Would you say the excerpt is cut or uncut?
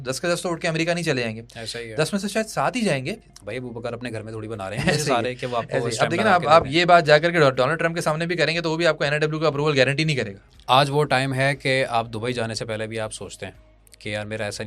cut